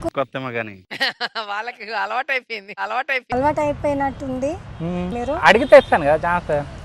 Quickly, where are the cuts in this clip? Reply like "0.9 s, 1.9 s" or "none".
5.1 s